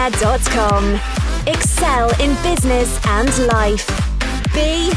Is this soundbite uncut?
yes; 0 cuts

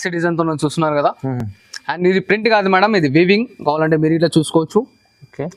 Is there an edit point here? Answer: no; 0 cuts

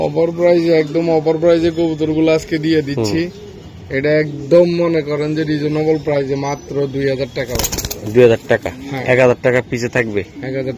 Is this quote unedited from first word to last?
yes; 0 cuts

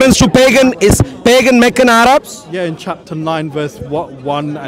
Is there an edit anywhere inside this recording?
no; 0 cuts

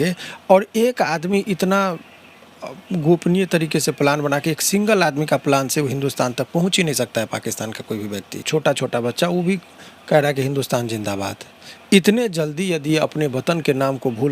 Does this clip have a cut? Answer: yes; 1 cut; at 8.4 s

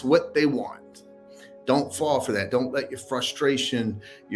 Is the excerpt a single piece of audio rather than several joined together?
yes; 0 cuts

